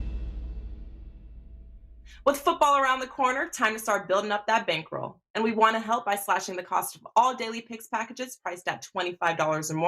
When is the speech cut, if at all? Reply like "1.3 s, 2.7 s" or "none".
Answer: 2.0 s